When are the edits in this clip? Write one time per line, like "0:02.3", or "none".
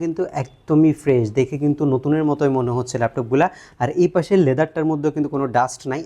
none